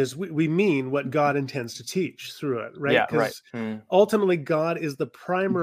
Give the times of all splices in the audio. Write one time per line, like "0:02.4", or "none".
none